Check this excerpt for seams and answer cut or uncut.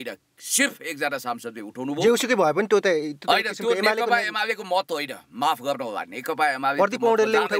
uncut